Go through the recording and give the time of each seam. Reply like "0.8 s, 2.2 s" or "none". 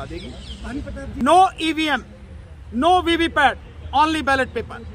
1.2 s